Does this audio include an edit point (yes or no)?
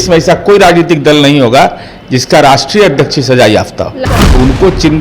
yes